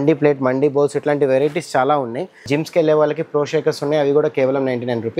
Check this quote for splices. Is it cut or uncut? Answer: cut